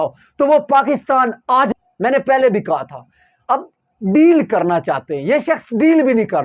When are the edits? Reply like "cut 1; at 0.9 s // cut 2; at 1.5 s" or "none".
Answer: cut 1; at 1.7 s